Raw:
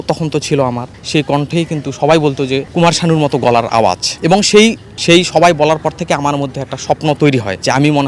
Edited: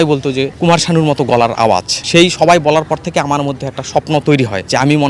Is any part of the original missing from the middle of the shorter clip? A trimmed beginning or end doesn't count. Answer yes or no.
yes